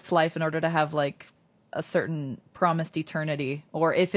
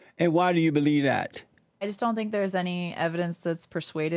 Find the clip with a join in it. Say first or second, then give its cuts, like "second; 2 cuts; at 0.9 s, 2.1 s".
second; 1 cut; at 1.9 s